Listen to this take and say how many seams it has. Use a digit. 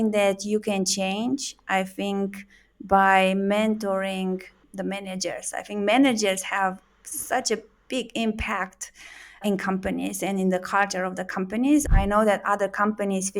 3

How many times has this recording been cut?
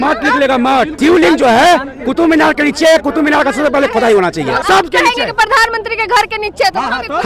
2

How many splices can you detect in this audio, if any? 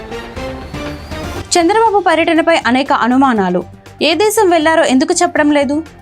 1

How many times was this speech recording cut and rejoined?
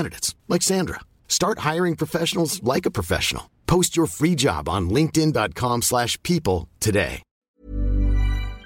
1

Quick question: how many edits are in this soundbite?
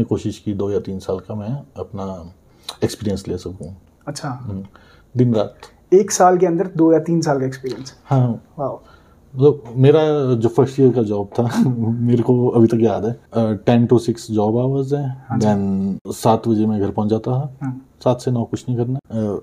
0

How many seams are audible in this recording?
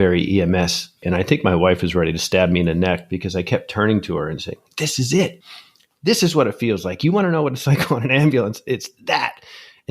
1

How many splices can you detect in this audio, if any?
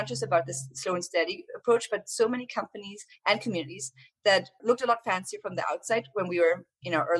1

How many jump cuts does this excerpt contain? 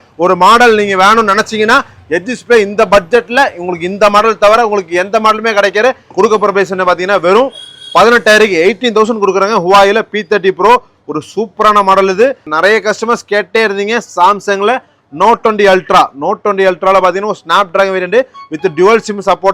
2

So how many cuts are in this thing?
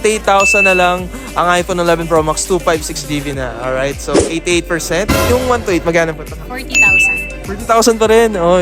1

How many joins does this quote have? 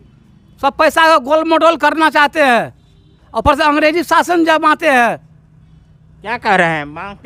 0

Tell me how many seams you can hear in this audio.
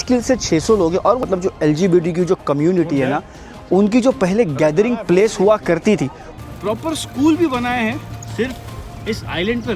2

